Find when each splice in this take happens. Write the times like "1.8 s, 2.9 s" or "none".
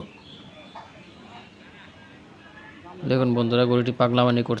none